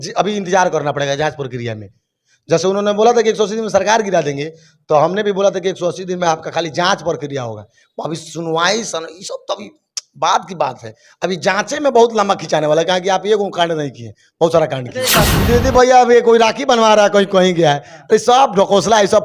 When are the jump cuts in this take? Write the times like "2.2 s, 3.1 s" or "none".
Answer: 15.3 s